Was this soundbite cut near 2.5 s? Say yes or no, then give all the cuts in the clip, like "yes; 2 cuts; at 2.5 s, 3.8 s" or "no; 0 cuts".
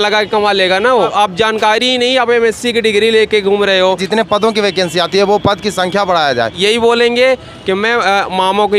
no; 3 cuts; at 1.1 s, 4.0 s, 6.5 s